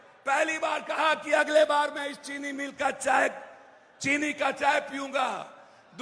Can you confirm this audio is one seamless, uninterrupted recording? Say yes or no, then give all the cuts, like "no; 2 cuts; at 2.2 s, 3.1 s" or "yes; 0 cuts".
yes; 0 cuts